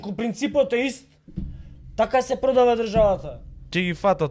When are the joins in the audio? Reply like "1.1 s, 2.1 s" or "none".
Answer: none